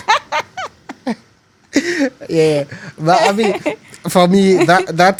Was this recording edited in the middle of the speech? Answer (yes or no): no